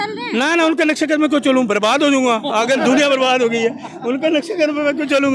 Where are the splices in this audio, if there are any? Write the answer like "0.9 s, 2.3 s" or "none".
none